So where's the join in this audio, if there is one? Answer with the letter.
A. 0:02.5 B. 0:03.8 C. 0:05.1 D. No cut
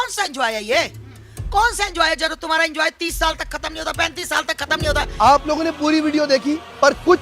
C